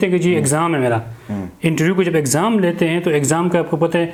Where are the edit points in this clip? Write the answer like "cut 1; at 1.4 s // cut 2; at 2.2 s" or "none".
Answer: none